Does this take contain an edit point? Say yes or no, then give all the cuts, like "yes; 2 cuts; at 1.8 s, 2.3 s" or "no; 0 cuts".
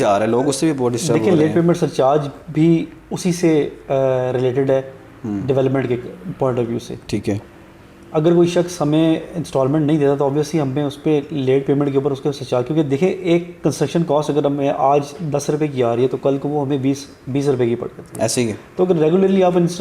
no; 0 cuts